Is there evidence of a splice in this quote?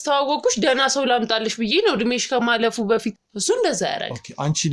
yes; 1 cut; at 3.3 s

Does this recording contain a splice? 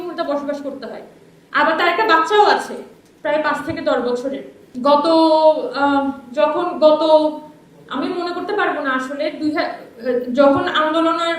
no; 0 cuts

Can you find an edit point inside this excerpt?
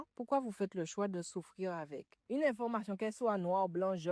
yes; 1 cut; at 2.1 s

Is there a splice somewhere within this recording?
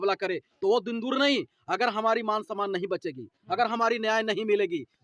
no; 0 cuts

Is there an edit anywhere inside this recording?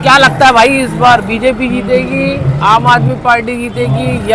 no; 0 cuts

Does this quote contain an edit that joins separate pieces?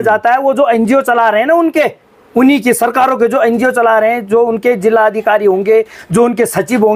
no; 0 cuts

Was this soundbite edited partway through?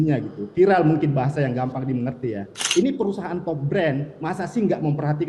yes; 1 cut; at 2.6 s

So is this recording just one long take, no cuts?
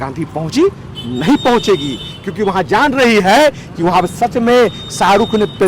yes; 0 cuts

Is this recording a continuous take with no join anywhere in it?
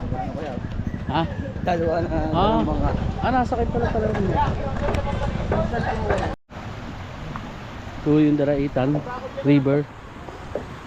yes; 0 cuts

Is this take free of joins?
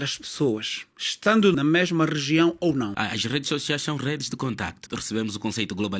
no; 3 cuts; at 1.5 s, 2.9 s, 4.9 s

